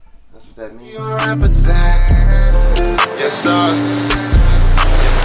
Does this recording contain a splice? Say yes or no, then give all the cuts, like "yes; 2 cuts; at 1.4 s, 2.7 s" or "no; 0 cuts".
yes; 1 cut; at 1.0 s